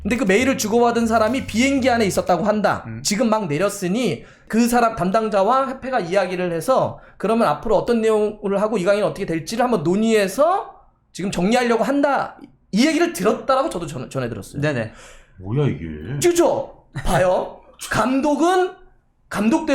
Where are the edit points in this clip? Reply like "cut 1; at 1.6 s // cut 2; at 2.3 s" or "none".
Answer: cut 1; at 4.4 s